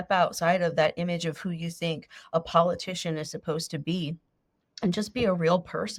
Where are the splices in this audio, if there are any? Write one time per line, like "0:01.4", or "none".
none